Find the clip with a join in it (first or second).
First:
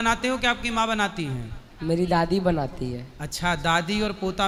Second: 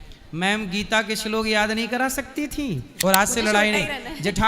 second